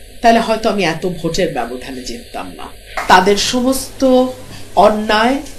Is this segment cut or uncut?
cut